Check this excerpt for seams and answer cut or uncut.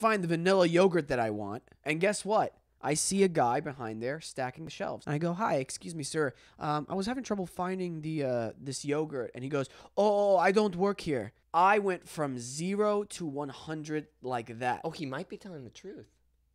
cut